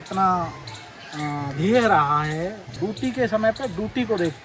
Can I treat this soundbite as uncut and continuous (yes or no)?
no